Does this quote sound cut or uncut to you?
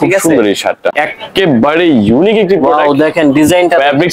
cut